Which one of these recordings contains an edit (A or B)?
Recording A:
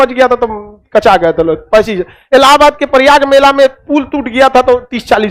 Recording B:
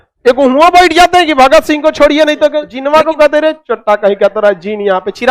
B